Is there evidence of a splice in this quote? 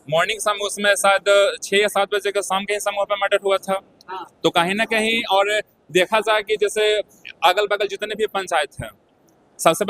no; 0 cuts

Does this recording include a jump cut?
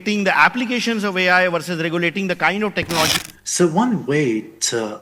yes; 1 cut; at 3.1 s

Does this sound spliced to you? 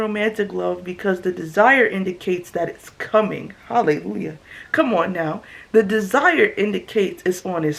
no; 0 cuts

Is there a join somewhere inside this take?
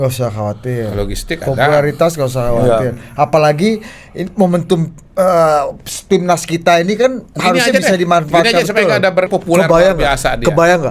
yes; 1 cut; at 9.3 s

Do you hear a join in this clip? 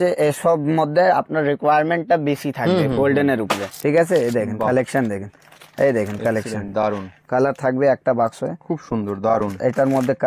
yes; 2 cuts; at 3.7 s, 7.2 s

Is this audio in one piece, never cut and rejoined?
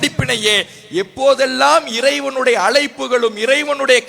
yes; 0 cuts

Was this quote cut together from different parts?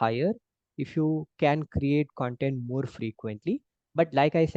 no; 0 cuts

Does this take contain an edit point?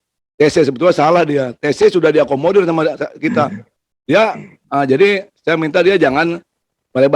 no; 0 cuts

